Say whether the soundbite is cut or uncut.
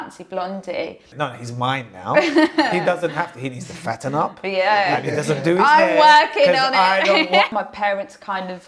cut